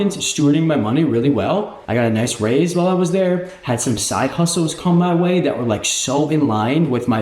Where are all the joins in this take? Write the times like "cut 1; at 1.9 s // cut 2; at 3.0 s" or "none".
cut 1; at 1.8 s